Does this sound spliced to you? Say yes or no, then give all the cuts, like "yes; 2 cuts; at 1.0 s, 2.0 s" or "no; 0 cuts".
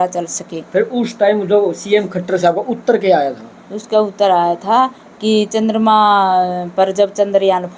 no; 0 cuts